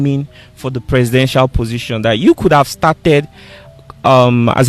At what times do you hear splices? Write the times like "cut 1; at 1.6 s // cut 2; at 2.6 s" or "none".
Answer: none